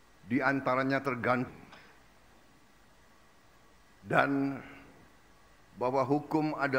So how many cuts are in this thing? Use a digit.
1